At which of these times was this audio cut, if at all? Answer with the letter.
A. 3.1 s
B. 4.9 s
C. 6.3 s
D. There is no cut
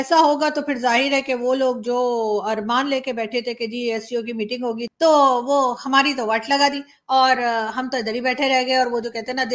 B